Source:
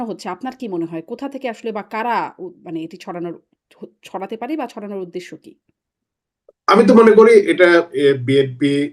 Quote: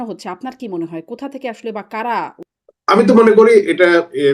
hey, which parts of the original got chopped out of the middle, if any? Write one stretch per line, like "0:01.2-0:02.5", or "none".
0:02.5-0:06.3